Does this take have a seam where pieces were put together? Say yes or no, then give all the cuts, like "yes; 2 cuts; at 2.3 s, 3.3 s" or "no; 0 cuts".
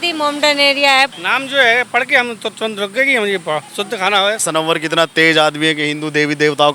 yes; 2 cuts; at 1.1 s, 4.4 s